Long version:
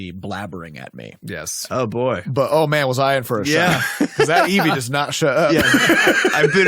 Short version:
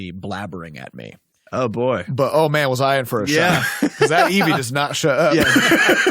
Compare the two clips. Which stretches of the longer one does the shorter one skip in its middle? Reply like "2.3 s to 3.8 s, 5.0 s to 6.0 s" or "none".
1.2 s to 1.4 s